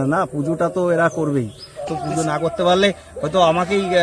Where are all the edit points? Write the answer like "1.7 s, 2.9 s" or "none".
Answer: 1.9 s